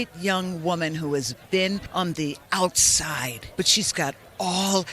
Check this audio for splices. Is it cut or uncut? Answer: cut